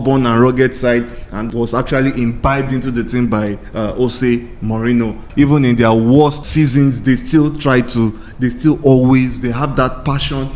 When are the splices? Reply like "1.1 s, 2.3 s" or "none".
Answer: 5.3 s, 6.4 s